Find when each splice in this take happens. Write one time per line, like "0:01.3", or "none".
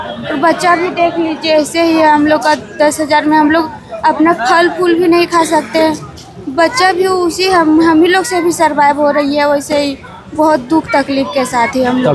none